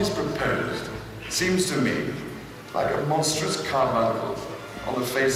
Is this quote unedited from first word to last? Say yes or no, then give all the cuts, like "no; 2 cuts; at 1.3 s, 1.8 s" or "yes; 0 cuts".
yes; 0 cuts